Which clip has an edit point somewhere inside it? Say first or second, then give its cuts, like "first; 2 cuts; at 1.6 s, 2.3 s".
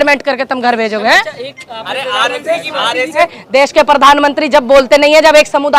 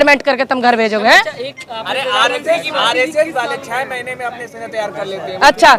first; 1 cut; at 3.2 s